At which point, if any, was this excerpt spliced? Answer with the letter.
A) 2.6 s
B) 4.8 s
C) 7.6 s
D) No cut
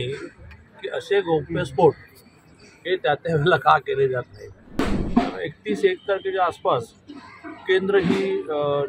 B